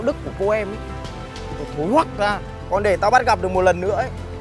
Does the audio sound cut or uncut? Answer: cut